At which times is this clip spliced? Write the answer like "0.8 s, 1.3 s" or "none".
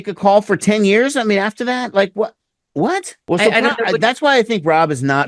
3.1 s